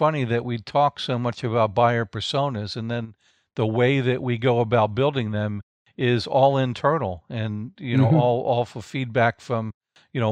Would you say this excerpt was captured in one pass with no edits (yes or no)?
yes